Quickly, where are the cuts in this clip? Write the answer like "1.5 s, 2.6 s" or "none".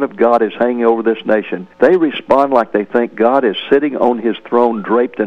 1.6 s

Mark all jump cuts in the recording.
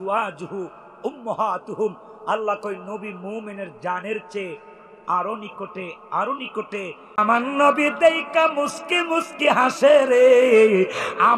7.2 s

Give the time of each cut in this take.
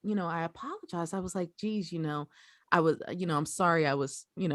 none

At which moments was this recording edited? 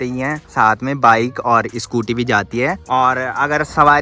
none

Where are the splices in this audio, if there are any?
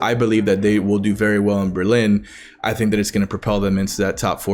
none

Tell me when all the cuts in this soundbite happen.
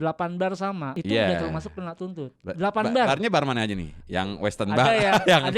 0.9 s

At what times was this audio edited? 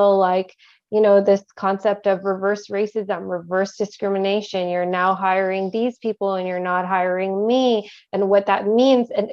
none

